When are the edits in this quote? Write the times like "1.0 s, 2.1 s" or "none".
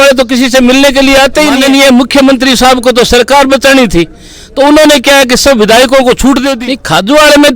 1.6 s, 6.6 s